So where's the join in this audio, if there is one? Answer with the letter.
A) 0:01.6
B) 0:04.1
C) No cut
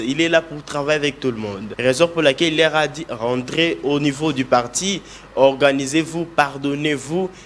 A